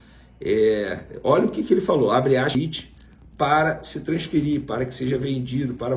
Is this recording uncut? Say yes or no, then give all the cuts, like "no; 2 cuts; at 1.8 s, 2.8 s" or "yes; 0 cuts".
no; 1 cut; at 2.5 s